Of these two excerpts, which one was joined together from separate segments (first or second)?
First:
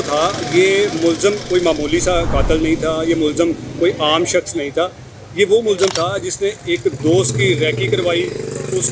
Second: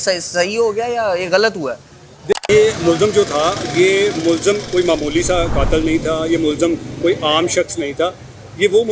second